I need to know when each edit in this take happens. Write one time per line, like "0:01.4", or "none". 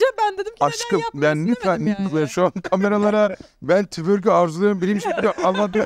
none